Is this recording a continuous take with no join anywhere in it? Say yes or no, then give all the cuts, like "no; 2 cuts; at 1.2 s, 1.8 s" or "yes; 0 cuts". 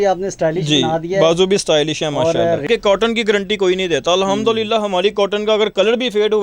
no; 1 cut; at 2.7 s